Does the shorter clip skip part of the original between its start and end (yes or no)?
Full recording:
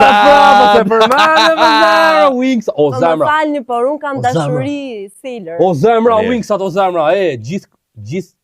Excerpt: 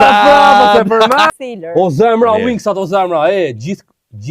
yes